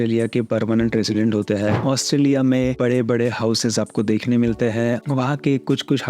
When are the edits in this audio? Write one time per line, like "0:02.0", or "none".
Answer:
0:01.8